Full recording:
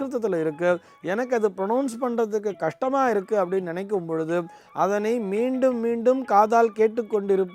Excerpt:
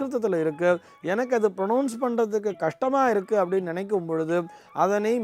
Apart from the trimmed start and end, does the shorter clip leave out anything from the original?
no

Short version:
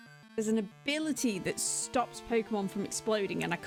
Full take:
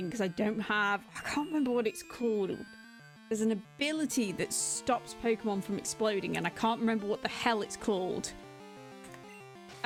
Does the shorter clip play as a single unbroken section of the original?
yes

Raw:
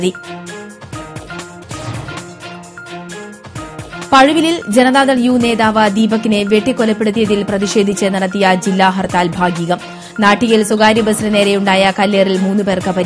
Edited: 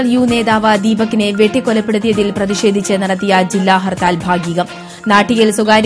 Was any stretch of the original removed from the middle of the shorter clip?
no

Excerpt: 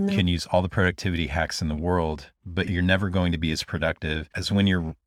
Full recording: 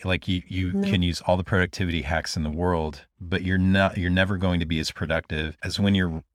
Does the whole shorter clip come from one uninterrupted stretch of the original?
no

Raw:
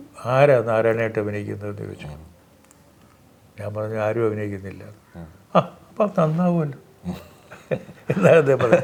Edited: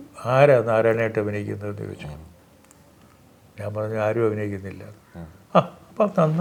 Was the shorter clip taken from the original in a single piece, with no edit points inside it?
yes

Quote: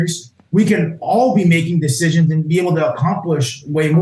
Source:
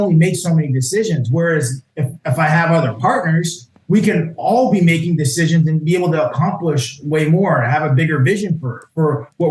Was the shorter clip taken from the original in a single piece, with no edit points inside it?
yes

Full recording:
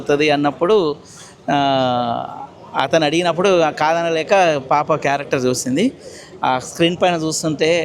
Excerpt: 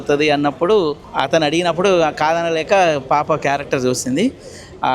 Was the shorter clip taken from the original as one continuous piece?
no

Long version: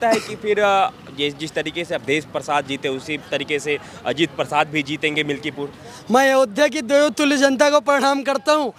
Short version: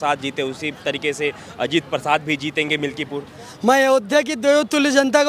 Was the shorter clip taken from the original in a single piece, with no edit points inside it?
yes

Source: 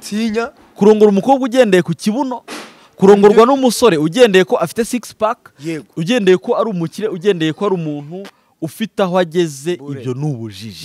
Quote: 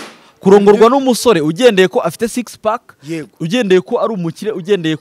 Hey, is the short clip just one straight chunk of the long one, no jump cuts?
yes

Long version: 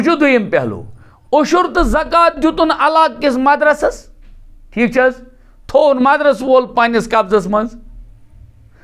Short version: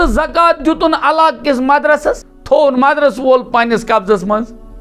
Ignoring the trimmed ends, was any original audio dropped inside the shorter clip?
yes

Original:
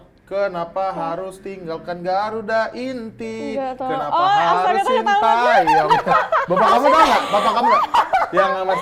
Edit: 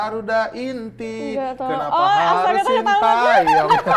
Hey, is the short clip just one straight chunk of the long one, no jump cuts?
yes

